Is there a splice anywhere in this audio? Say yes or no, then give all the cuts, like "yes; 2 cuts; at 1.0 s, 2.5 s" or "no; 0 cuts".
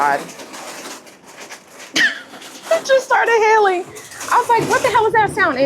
no; 0 cuts